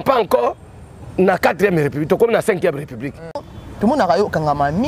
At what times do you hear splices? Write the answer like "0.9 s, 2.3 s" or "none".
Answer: 3.4 s